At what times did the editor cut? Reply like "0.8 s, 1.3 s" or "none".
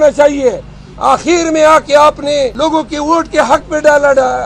2.5 s